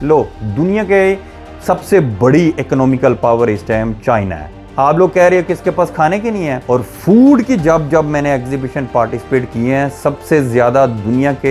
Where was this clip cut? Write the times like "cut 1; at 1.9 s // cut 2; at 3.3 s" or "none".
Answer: none